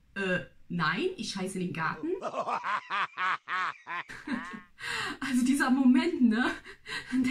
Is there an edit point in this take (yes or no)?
yes